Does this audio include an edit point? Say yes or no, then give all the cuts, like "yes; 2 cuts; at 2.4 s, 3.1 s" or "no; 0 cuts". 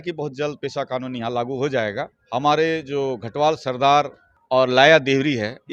yes; 1 cut; at 2.1 s